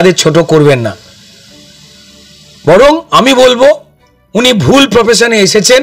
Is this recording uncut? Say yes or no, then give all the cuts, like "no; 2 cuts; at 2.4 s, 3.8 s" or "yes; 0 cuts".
yes; 0 cuts